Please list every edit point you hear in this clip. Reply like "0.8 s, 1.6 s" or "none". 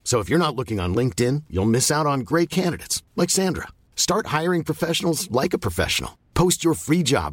none